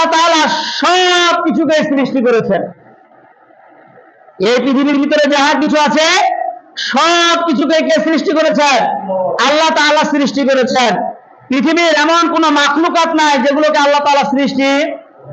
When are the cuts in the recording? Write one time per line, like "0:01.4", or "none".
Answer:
none